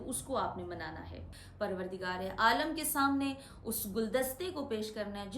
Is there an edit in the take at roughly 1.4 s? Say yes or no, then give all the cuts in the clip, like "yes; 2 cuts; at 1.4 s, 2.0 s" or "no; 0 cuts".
yes; 1 cut; at 1.4 s